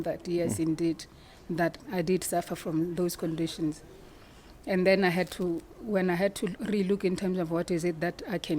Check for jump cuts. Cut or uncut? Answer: uncut